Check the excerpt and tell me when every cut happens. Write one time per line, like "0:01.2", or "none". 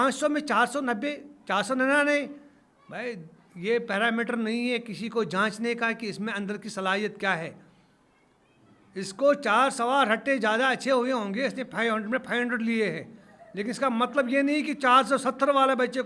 none